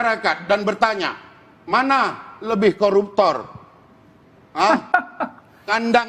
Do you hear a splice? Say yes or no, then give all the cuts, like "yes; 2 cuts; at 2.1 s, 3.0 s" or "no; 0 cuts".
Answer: no; 0 cuts